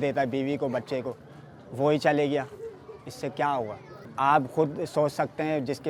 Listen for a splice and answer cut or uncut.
uncut